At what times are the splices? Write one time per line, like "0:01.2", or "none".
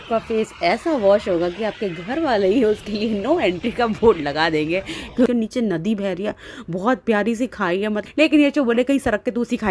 0:05.2
0:08.0